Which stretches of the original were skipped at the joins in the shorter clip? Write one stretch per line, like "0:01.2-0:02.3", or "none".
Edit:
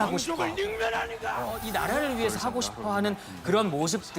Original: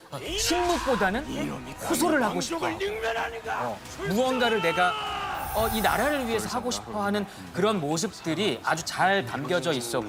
0:03.8-0:05.7